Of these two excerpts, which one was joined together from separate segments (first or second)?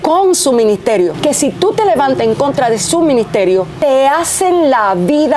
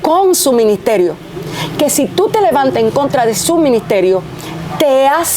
first